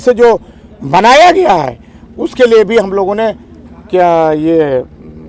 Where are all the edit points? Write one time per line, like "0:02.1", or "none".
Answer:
none